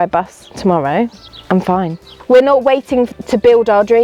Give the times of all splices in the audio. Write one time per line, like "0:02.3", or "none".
0:01.3
0:02.1